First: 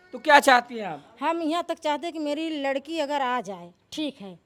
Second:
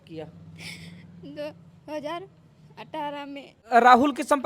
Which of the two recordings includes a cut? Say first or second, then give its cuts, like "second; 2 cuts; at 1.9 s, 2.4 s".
second; 1 cut; at 3.6 s